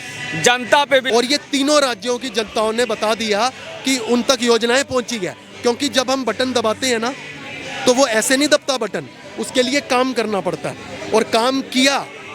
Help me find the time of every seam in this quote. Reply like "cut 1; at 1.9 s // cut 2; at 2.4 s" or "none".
cut 1; at 1.1 s